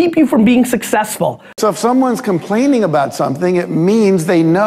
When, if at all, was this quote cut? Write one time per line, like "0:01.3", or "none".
0:01.4